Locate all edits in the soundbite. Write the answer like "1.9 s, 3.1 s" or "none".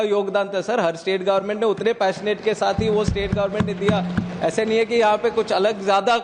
none